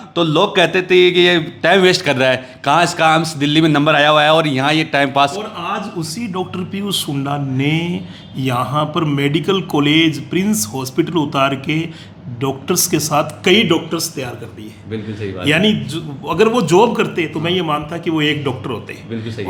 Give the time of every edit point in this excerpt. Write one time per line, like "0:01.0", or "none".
none